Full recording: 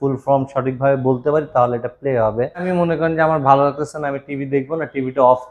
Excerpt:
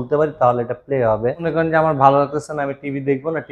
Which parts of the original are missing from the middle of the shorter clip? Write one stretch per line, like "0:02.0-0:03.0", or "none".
0:02.6-0:02.9

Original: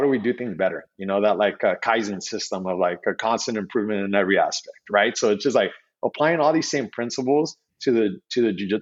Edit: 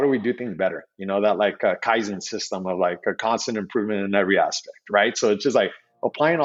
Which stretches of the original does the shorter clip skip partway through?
none

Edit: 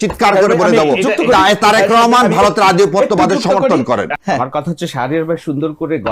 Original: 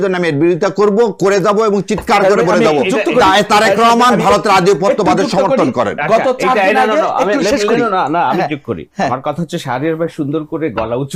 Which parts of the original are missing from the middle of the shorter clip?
0:06.0-0:08.8

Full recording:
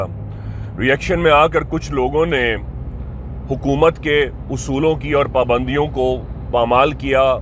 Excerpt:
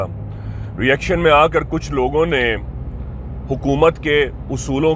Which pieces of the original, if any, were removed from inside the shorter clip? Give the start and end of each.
none

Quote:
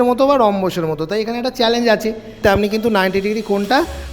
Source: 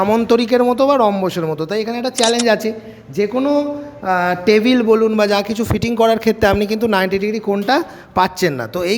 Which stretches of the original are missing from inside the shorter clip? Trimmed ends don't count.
0:03.0-0:06.4

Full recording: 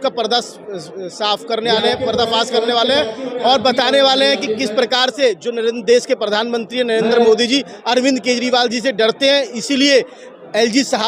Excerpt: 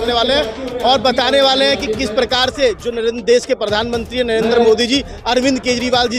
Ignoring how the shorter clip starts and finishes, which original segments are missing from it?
none

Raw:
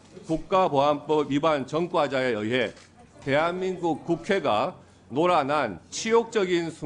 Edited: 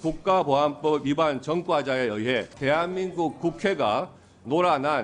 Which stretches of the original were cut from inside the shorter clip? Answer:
0:02.8-0:03.2

